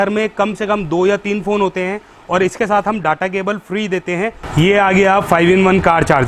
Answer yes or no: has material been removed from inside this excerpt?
yes